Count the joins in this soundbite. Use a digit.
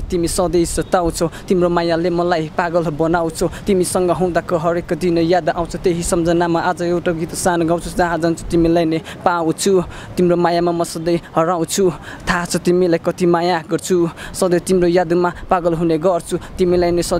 0